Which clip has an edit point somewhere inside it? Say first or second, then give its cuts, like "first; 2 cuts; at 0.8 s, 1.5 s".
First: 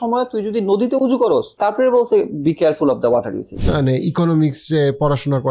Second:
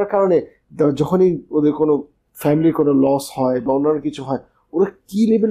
first; 2 cuts; at 1.5 s, 3.6 s